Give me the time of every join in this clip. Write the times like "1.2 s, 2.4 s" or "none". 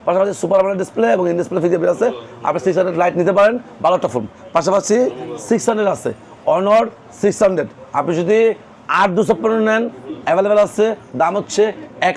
none